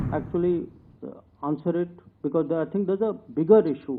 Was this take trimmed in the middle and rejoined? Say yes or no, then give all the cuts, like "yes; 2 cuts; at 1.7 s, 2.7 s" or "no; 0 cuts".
no; 0 cuts